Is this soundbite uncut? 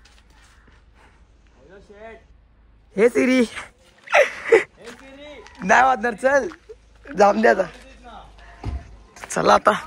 yes; 0 cuts

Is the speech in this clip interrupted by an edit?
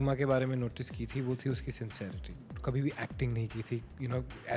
yes; 1 cut; at 2.6 s

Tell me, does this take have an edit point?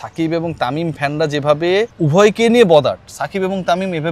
yes; 1 cut; at 1.9 s

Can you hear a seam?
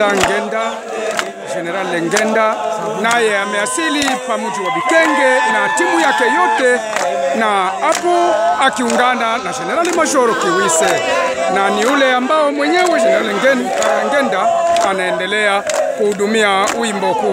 no; 0 cuts

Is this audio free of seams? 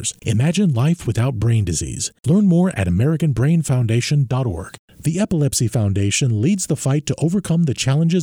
no; 1 cut; at 4.8 s

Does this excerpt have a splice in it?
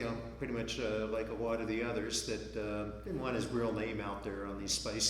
yes; 1 cut; at 3.0 s

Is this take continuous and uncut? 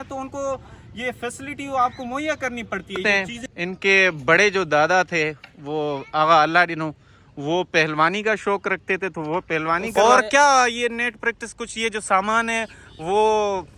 no; 2 cuts; at 3.0 s, 9.9 s

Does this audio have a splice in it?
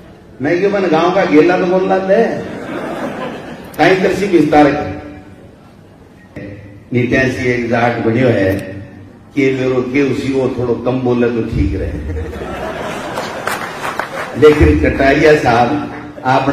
yes; 1 cut; at 6.5 s

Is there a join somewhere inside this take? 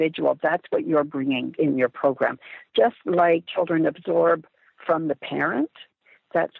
yes; 2 cuts; at 1.5 s, 3.5 s

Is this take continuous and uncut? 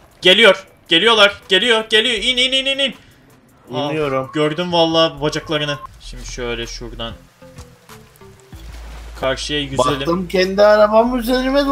no; 1 cut; at 5.9 s

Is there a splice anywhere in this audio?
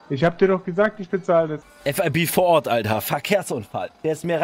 yes; 1 cut; at 1.6 s

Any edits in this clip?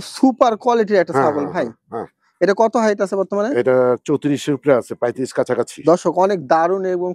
no; 0 cuts

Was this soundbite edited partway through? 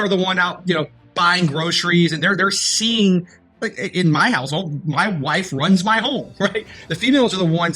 yes; 1 cut; at 6.7 s

